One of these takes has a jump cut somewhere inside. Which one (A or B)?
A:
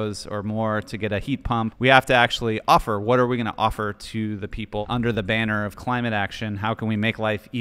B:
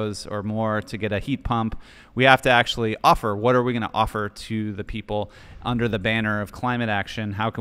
A